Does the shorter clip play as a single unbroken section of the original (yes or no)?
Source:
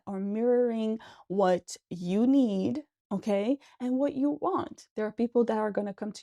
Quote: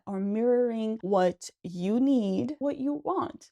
no